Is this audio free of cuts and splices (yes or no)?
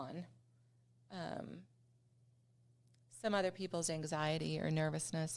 yes